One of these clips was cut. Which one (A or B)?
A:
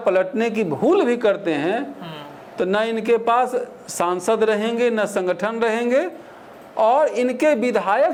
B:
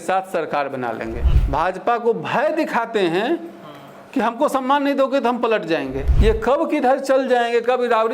B